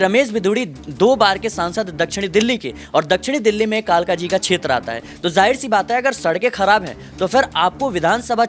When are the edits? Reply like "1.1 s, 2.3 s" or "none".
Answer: none